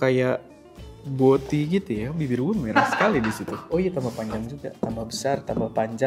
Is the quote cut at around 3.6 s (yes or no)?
yes